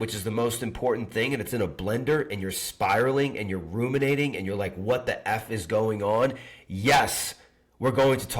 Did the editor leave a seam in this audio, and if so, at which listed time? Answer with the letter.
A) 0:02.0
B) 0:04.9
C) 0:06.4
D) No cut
D